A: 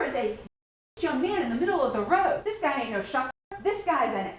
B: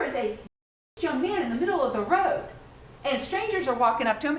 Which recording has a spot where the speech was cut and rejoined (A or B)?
A